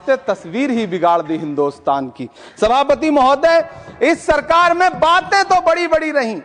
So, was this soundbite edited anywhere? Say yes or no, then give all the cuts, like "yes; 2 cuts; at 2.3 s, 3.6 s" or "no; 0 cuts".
no; 0 cuts